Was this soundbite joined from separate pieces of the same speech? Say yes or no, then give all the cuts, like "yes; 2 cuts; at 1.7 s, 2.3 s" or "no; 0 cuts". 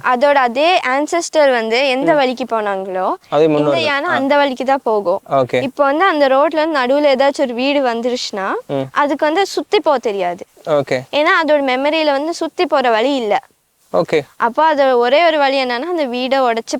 no; 0 cuts